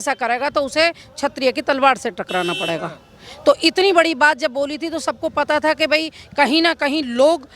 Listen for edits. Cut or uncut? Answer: uncut